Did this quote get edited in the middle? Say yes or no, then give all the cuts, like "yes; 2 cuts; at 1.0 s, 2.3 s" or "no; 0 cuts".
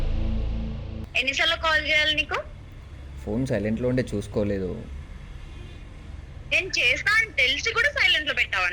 yes; 1 cut; at 1.1 s